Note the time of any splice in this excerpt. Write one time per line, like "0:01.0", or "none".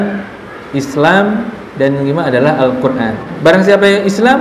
0:03.3